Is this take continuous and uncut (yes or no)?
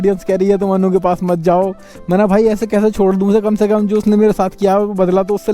yes